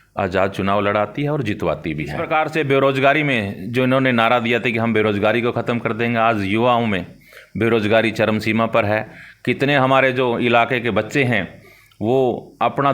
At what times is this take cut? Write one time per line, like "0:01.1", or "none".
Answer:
0:02.2